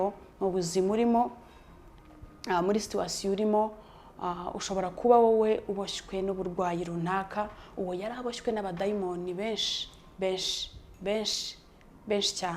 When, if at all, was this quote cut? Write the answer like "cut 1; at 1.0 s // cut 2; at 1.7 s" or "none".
none

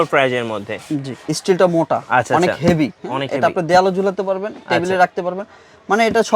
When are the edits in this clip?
cut 1; at 1.1 s

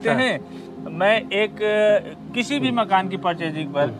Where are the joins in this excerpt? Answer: none

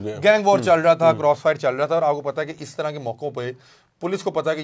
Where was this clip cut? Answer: none

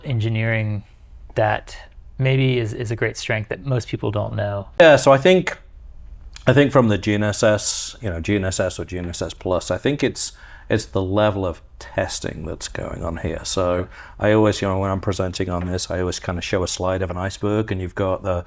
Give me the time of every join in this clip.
cut 1; at 4.8 s

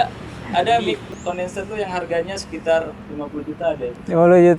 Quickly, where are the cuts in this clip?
cut 1; at 1.2 s

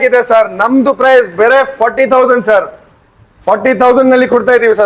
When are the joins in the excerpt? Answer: none

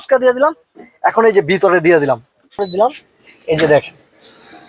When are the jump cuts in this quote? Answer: cut 1; at 2.6 s

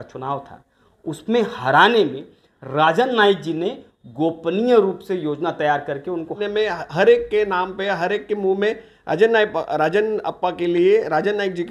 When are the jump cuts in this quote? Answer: cut 1; at 6.4 s

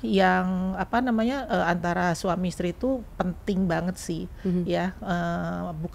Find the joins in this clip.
none

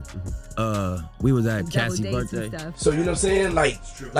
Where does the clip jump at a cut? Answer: cut 1; at 2.5 s

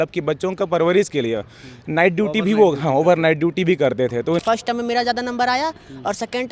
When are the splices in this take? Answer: cut 1; at 4.4 s

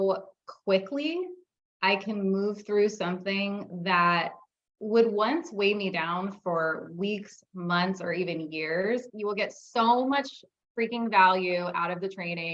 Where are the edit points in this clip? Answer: cut 1; at 9.1 s

